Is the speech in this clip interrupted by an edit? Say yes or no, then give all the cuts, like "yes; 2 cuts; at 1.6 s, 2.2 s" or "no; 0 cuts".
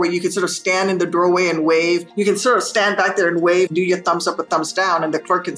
yes; 2 cuts; at 2.1 s, 3.7 s